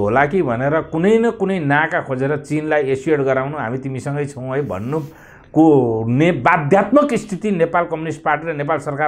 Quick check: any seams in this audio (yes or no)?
no